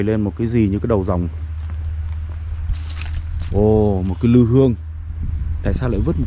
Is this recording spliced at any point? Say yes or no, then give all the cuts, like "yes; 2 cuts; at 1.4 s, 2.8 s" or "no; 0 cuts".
no; 0 cuts